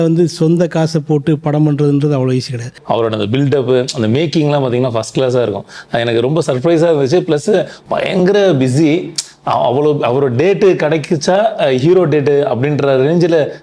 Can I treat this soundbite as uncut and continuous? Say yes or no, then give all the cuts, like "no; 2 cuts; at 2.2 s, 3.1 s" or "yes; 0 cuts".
no; 2 cuts; at 2.8 s, 7.8 s